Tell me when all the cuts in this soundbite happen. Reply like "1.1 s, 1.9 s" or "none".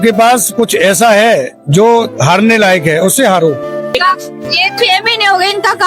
3.7 s